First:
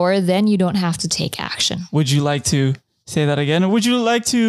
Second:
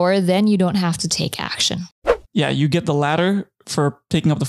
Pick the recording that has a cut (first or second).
second